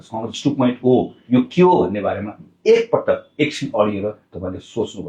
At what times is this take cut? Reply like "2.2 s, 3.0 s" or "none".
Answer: none